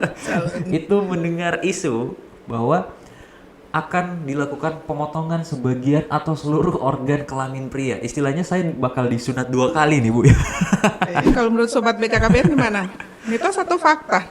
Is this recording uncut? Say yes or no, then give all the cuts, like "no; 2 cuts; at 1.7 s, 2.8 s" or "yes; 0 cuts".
no; 1 cut; at 11.4 s